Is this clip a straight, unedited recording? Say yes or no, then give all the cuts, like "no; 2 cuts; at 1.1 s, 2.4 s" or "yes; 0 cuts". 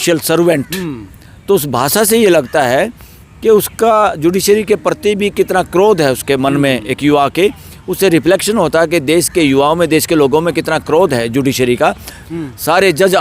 no; 1 cut; at 12.2 s